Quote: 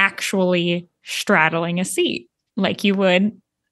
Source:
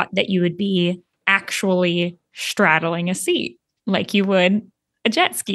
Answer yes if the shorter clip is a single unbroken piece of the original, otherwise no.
yes